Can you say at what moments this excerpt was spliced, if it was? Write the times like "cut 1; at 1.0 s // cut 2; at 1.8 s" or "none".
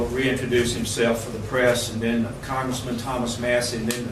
none